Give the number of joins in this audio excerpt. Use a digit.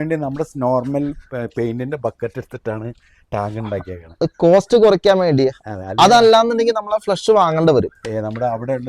0